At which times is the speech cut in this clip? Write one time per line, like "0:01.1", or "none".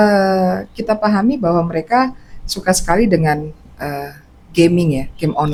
none